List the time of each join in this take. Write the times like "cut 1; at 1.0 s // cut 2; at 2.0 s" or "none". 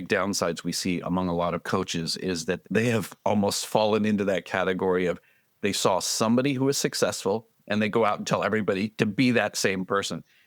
cut 1; at 2.6 s